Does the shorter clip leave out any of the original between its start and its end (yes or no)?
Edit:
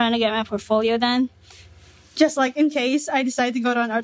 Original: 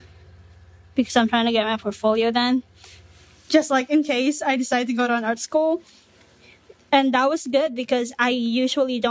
no